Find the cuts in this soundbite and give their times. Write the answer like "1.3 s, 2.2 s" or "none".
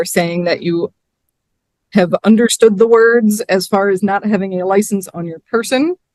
none